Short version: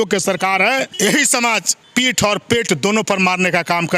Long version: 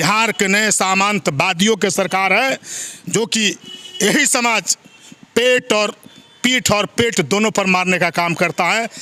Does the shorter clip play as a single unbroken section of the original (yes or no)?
no